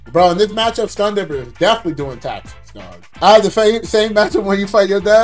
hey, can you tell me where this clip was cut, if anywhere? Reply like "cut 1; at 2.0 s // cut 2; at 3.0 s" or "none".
cut 1; at 3.0 s

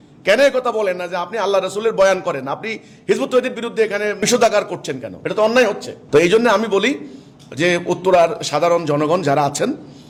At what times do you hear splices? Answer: none

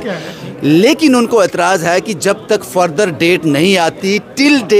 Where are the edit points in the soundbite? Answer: none

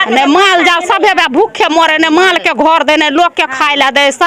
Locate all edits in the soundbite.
none

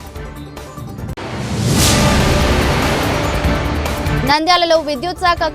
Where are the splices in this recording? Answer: cut 1; at 4.2 s

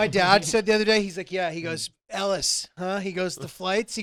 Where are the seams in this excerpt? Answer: none

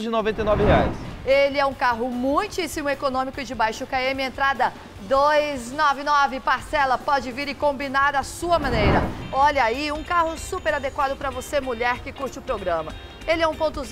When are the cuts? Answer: cut 1; at 1.1 s // cut 2; at 9.2 s

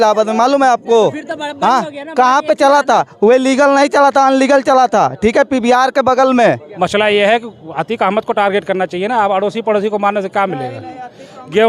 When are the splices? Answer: cut 1; at 6.7 s

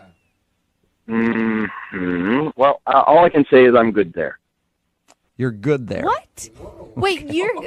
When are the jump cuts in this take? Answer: none

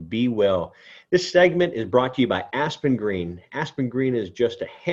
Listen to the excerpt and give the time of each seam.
none

